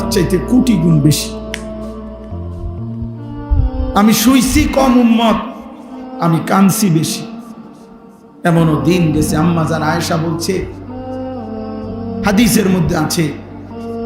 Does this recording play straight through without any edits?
no; 2 cuts; at 1.2 s, 2.9 s

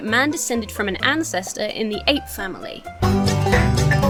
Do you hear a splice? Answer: no; 0 cuts

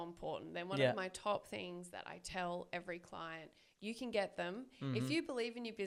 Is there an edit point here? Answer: no; 0 cuts

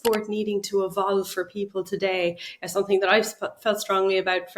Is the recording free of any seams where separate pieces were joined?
yes; 0 cuts

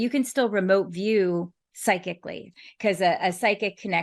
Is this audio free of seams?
no; 1 cut; at 2.4 s

